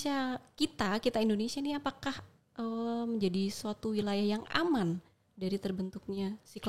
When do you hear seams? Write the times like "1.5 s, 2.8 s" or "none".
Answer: none